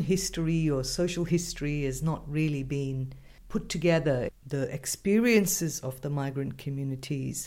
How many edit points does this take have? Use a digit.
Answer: 0